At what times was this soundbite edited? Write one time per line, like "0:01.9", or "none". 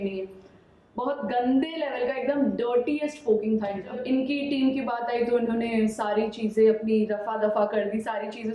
0:04.0